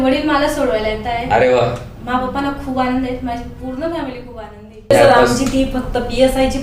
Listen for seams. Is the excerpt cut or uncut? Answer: cut